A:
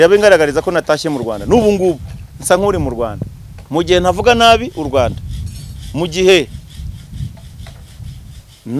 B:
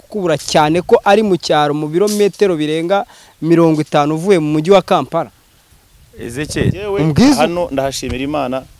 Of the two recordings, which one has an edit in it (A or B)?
B